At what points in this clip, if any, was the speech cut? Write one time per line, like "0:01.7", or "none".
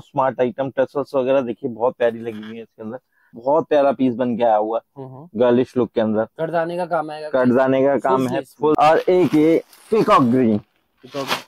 0:03.3
0:08.7